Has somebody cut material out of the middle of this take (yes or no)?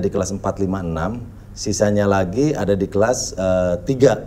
no